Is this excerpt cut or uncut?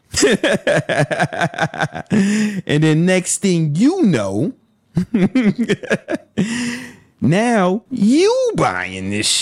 uncut